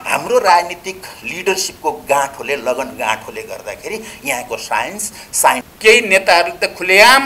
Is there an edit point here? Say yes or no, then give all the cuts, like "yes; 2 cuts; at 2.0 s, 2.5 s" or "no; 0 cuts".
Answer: yes; 1 cut; at 5.7 s